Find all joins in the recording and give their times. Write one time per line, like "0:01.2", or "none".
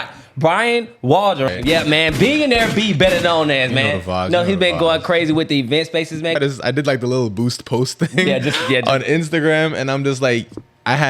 0:01.5
0:06.4

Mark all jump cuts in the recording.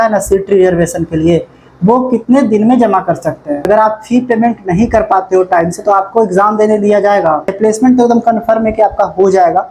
0:03.6
0:07.7

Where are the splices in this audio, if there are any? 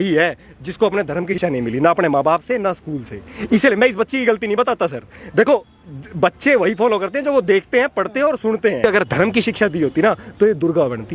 0:01.4
0:08.8

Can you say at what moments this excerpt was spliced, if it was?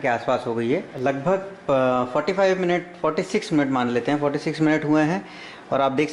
0:00.9

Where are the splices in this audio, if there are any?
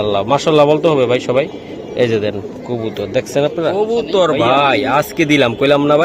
0:03.7

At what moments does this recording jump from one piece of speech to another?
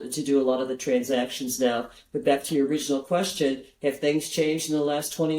none

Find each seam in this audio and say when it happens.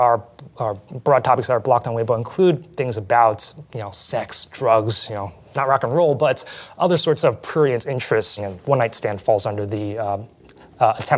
0:08.3

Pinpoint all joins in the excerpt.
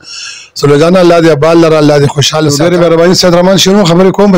0:02.5

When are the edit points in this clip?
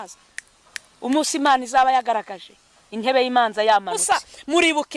0:04.0

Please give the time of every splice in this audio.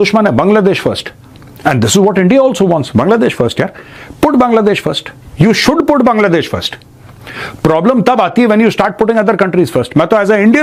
none

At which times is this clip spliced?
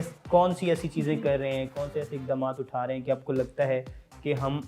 none

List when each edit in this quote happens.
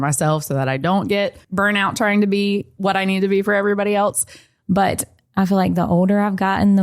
0:01.4
0:02.7
0:04.5

